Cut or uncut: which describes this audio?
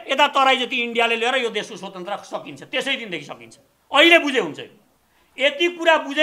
uncut